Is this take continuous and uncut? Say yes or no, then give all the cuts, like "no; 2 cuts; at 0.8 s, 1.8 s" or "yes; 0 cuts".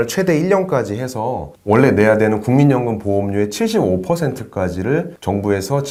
yes; 0 cuts